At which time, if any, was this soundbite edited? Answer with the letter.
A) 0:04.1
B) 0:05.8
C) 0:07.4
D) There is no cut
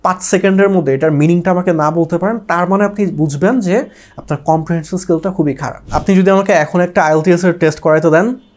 B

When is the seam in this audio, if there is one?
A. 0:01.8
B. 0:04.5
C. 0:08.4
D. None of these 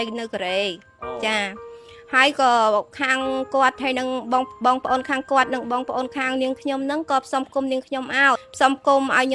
C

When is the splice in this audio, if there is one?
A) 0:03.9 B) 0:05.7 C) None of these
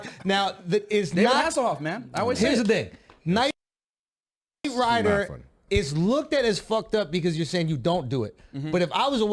C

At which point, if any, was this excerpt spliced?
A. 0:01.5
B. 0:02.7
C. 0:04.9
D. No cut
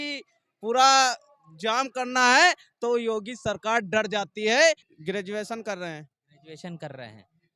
C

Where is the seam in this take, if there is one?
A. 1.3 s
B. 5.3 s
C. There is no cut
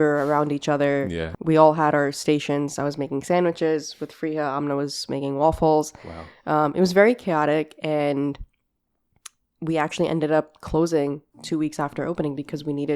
A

